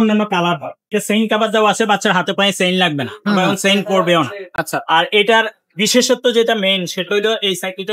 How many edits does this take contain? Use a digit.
1